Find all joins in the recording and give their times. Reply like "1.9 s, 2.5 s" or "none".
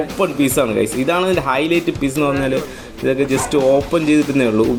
none

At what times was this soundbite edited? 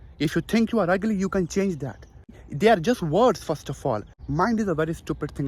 2.4 s, 4.2 s

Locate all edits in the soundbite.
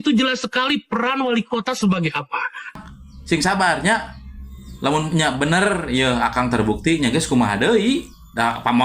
2.7 s

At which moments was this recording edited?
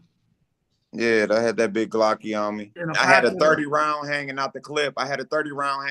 2.8 s

